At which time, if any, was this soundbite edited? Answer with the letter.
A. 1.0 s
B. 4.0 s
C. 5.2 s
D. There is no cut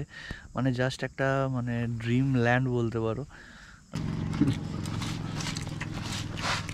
B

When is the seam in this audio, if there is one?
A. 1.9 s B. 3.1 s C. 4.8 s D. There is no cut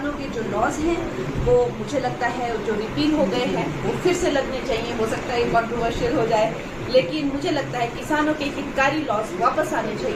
D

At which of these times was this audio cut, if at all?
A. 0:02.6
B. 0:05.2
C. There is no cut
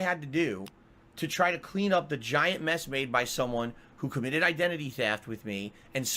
B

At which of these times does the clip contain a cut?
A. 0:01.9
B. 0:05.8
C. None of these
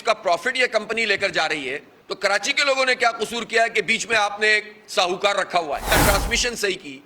B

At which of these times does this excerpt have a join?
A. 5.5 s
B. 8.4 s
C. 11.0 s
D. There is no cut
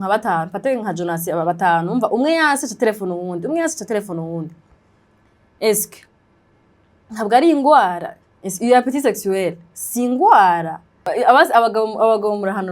C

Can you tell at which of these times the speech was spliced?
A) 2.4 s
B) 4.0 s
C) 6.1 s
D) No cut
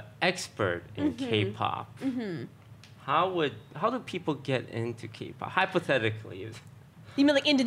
D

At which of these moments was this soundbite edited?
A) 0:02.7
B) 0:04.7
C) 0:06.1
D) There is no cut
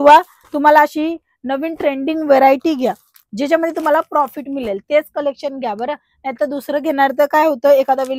D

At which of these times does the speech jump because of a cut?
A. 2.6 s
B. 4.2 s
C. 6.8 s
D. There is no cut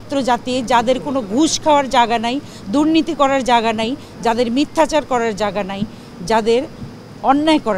D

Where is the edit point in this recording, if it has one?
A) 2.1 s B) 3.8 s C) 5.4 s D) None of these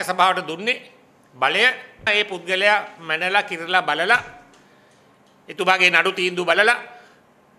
A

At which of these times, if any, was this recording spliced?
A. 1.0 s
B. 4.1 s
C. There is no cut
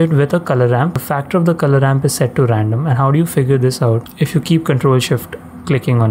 A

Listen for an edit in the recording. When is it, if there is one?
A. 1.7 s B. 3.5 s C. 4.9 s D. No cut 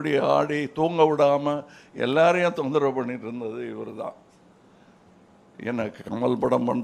D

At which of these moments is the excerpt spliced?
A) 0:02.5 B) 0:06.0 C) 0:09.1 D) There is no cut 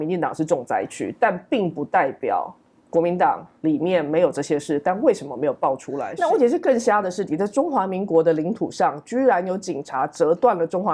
B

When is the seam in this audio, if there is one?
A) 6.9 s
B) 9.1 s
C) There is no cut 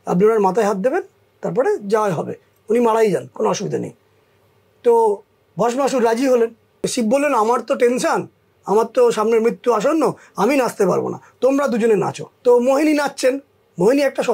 A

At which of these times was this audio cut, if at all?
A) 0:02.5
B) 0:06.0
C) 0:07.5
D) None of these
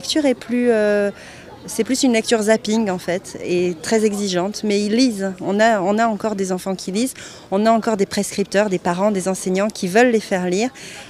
A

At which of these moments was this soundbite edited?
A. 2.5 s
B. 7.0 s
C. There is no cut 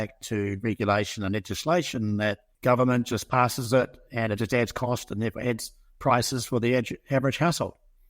A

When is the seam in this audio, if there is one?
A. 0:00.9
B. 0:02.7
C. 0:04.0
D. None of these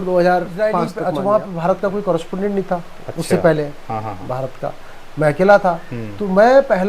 A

